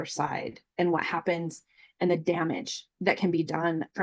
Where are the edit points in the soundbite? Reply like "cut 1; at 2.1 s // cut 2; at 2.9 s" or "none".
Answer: none

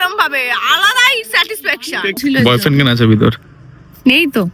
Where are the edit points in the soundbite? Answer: cut 1; at 2.2 s

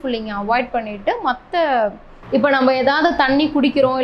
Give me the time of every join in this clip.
cut 1; at 2.1 s

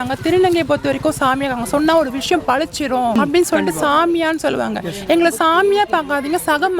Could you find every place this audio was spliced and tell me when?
cut 1; at 3.2 s

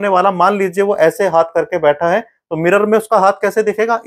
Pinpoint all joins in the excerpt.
none

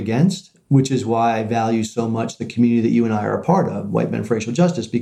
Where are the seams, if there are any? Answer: none

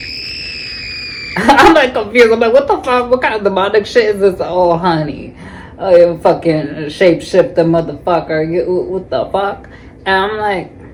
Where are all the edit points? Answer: none

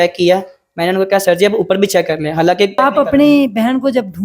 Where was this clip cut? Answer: cut 1; at 2.7 s

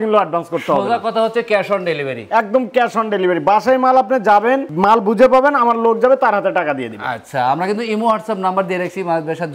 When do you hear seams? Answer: none

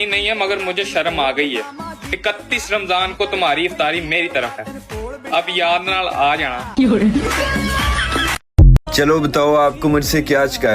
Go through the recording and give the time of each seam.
cut 1; at 8.8 s

